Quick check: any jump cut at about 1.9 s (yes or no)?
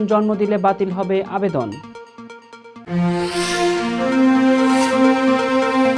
no